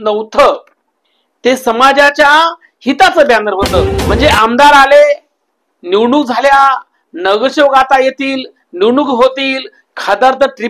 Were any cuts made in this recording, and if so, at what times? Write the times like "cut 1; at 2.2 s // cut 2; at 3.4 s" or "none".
cut 1; at 4.0 s